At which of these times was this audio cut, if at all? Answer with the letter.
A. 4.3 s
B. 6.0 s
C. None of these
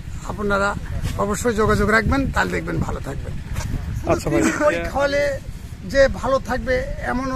A